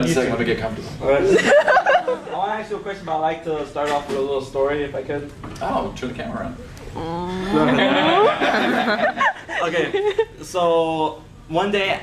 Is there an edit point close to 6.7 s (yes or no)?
no